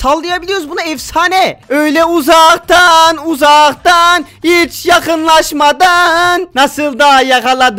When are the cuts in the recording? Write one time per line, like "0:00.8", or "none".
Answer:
0:01.6